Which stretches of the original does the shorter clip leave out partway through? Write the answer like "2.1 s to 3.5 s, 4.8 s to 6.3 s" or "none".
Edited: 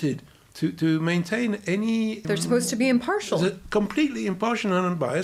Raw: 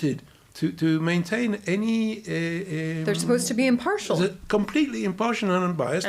2.2 s to 3.0 s